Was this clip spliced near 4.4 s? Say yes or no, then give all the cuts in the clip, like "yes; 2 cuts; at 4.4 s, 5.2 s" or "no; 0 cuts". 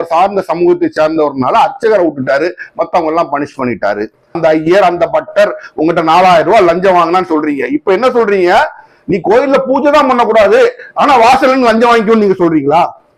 yes; 1 cut; at 4.4 s